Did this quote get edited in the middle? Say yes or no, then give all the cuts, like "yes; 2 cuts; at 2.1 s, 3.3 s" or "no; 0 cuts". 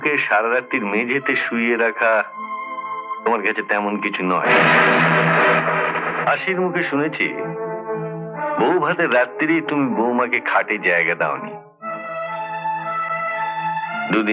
no; 0 cuts